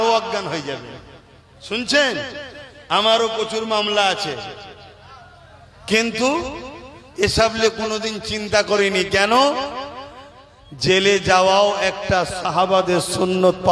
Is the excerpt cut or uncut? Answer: uncut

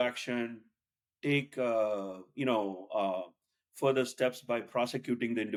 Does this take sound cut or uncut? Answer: uncut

